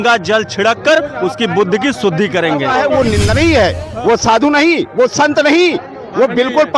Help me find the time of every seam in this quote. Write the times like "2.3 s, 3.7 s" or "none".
2.8 s